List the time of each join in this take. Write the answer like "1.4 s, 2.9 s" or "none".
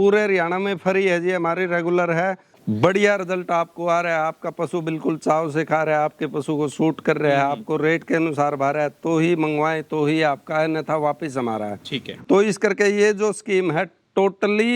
2.5 s, 12.1 s

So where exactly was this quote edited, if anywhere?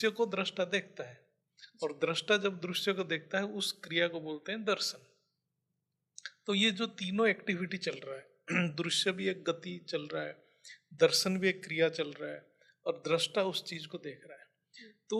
none

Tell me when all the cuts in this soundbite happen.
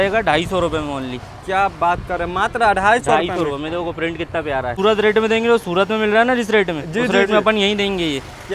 4.7 s

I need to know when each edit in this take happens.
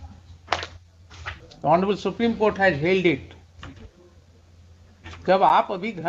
1.4 s

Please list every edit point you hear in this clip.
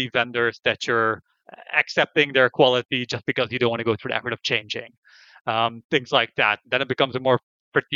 none

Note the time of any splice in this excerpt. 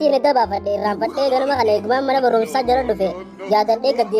none

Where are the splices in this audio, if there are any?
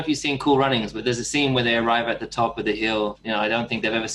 1.0 s, 3.2 s

